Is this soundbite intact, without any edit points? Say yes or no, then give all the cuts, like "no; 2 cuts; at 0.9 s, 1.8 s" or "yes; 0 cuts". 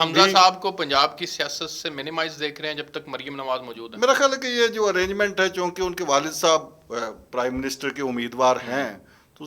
yes; 0 cuts